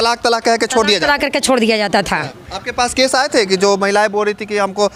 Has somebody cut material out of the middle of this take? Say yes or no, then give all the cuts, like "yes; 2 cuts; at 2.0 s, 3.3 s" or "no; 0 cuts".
no; 0 cuts